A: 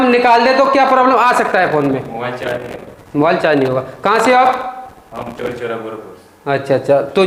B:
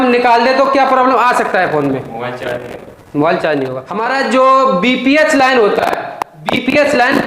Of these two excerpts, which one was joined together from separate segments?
B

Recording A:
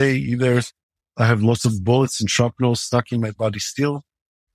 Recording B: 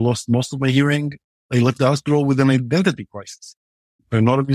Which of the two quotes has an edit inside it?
B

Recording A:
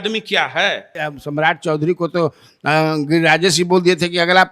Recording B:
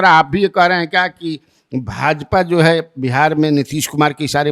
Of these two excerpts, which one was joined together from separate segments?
A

